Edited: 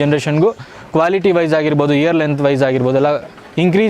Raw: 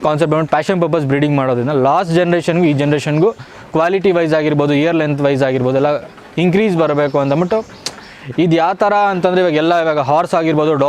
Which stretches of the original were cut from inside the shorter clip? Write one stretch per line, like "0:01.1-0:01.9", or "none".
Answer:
none